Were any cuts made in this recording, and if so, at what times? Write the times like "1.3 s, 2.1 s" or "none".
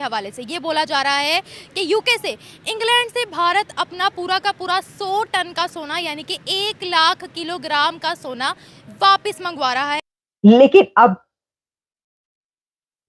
10.0 s